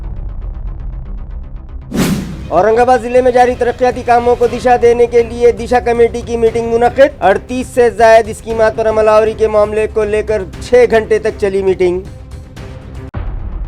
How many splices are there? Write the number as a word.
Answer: one